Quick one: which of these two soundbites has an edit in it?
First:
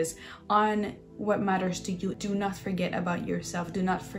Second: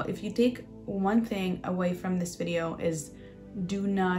first; 1 cut; at 2.2 s

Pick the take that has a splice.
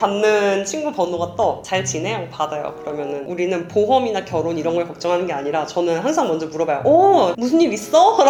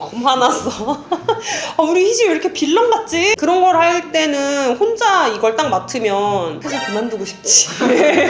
second; 1 cut; at 3.4 s

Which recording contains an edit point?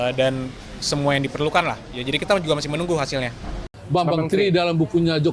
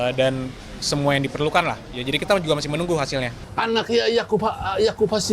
second; 1 cut; at 3.4 s

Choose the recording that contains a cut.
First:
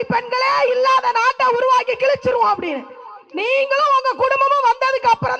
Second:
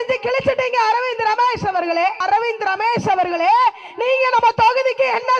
second; 1 cut; at 2.2 s

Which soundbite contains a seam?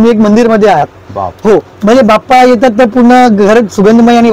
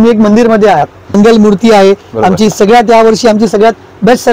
second; 1 cut; at 1.1 s

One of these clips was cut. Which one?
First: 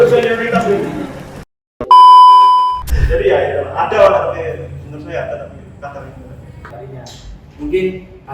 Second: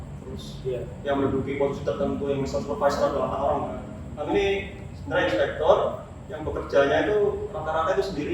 first; 1 cut; at 6.7 s

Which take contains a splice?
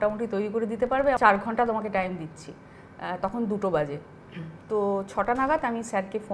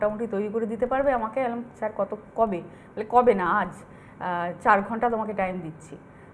first; 1 cut; at 1.2 s

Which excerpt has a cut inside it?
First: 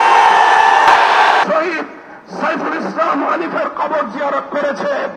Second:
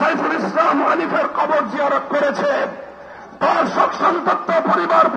first; 1 cut; at 1.4 s

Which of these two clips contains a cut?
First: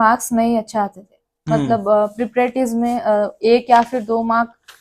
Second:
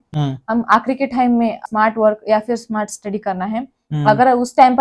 second; 1 cut; at 1.6 s

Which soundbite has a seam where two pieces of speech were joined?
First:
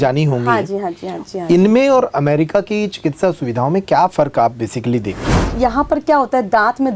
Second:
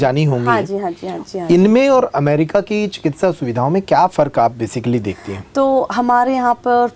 first; 1 cut; at 5.4 s

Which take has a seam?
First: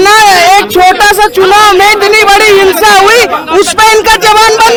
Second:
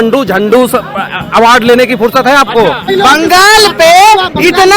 second; 1 cut; at 2.8 s

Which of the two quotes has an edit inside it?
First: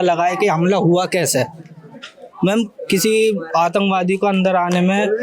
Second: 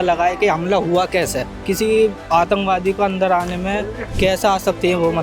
second; 1 cut; at 1.5 s

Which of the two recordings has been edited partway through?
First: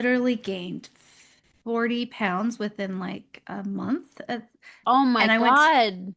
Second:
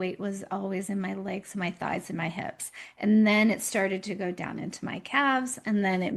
first; 1 cut; at 4.7 s

